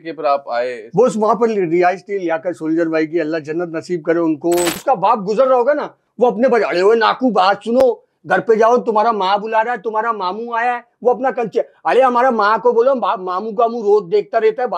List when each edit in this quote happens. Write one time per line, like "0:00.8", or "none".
0:04.8